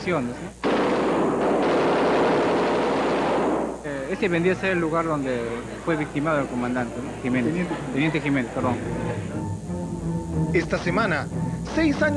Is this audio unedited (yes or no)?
yes